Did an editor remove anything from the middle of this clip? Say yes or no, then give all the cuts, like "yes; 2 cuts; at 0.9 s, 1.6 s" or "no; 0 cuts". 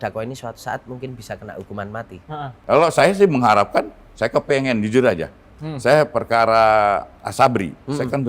yes; 1 cut; at 2.5 s